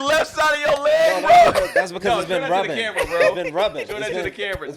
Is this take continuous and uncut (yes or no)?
yes